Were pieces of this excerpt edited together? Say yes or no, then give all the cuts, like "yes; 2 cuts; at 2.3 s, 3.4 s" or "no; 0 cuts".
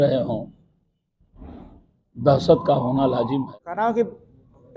yes; 1 cut; at 3.5 s